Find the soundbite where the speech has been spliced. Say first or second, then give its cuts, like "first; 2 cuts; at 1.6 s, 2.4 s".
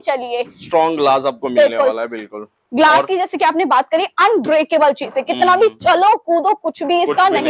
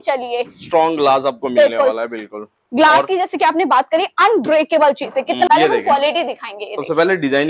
second; 1 cut; at 5.5 s